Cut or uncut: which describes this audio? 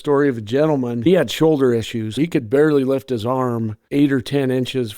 cut